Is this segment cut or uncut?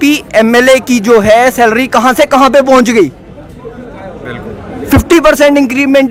uncut